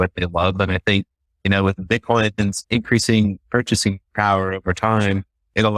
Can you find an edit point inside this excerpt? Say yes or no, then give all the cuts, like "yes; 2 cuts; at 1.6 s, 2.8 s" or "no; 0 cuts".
yes; 1 cut; at 2.6 s